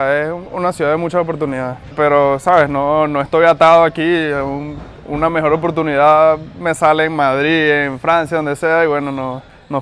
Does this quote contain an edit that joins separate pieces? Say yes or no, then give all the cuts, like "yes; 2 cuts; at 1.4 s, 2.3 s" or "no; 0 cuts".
no; 0 cuts